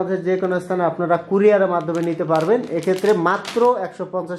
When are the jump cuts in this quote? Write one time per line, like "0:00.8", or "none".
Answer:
none